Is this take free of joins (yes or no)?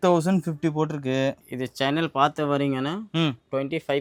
yes